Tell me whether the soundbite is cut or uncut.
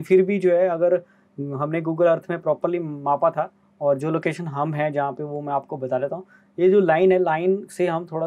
uncut